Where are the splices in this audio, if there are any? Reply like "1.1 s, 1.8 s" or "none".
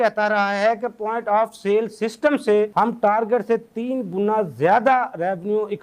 none